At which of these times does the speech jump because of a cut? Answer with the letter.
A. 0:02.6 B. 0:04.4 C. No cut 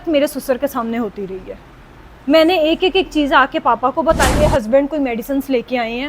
B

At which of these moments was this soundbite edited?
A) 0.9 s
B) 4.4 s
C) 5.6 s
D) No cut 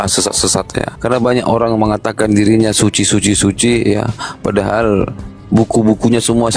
A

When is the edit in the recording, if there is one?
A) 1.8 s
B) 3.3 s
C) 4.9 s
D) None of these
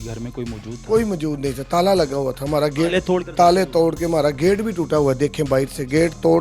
B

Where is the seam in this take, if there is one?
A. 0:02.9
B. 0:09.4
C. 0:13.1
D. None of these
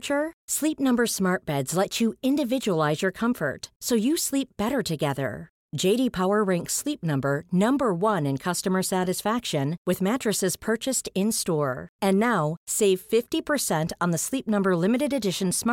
D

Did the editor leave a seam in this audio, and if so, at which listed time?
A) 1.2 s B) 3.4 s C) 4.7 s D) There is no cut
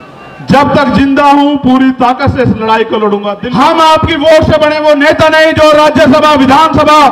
B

